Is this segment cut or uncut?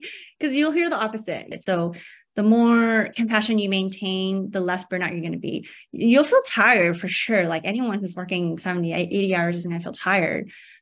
cut